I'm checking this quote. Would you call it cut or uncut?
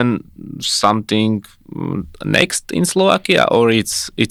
uncut